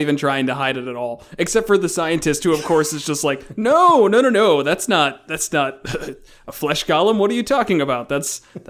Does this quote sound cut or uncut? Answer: uncut